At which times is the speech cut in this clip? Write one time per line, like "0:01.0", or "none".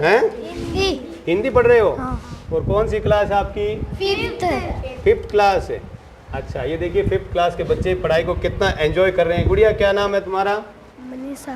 none